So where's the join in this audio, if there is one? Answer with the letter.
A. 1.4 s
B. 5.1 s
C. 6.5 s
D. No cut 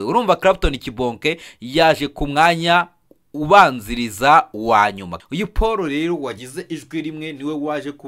B